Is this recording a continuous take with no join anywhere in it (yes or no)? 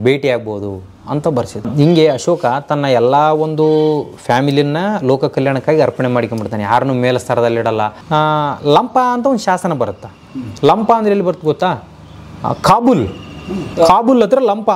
no